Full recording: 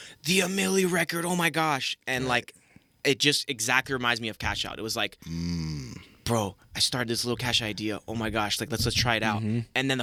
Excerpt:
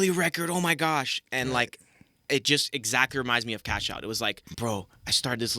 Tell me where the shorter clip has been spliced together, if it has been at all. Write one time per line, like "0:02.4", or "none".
0:04.5